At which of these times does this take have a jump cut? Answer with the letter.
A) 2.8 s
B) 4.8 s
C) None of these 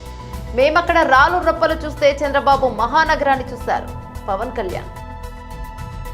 B